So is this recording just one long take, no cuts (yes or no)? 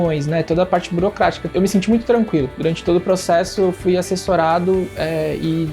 no